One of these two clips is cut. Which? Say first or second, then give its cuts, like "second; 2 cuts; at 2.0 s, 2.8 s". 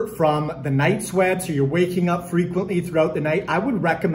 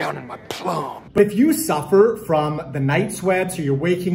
second; 1 cut; at 1.2 s